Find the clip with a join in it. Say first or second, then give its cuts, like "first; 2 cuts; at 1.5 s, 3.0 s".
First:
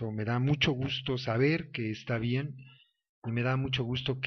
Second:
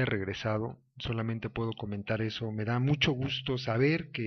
second; 1 cut; at 1.5 s